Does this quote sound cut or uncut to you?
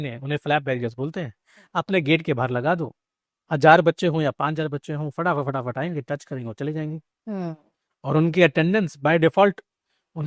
uncut